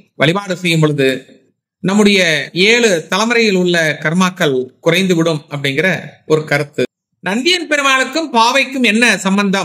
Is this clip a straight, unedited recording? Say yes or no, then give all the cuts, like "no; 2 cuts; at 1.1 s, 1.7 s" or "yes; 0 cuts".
no; 1 cut; at 6.9 s